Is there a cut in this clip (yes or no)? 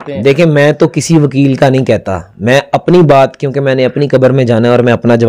no